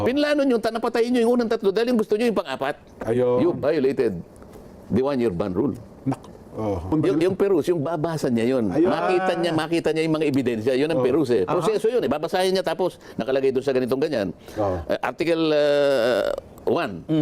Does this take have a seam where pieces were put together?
yes; 1 cut; at 6.9 s

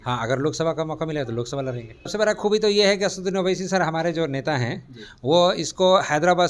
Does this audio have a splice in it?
yes; 1 cut; at 2.1 s

